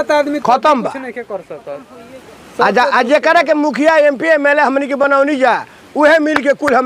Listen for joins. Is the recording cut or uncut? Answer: uncut